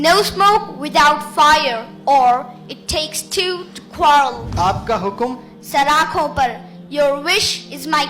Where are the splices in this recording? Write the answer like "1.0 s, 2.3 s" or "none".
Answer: 4.4 s